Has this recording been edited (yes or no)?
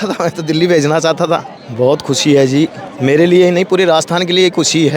yes